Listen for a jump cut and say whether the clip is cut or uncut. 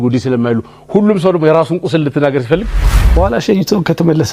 cut